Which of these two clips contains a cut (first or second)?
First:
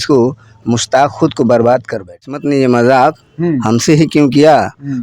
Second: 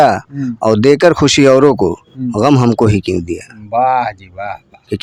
first